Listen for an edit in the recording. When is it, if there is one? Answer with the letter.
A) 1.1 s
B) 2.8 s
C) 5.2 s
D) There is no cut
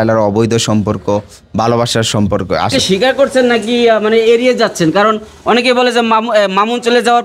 B